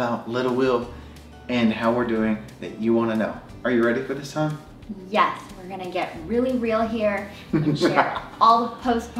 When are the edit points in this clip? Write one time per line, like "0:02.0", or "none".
none